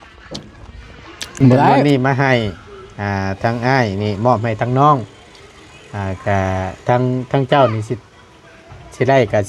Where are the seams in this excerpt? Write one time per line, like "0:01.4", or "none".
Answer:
0:01.8